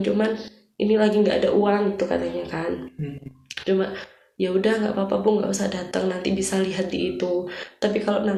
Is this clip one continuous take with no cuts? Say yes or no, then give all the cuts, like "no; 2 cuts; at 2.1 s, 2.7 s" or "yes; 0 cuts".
yes; 0 cuts